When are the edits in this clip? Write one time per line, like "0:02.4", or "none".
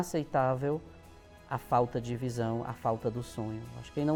none